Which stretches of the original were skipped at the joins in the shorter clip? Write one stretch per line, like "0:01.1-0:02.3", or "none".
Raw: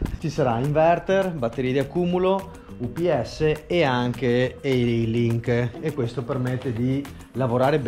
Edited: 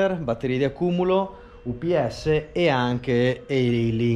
none